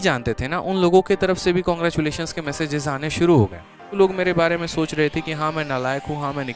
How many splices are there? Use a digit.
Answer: 1